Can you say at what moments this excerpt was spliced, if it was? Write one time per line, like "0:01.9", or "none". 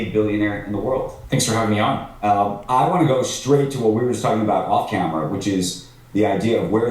0:01.2
0:02.6